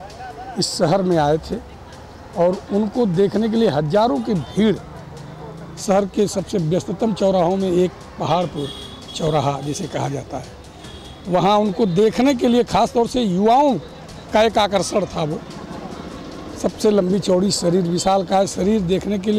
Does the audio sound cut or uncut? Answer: uncut